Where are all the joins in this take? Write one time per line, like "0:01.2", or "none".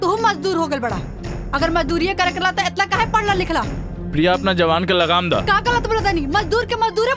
none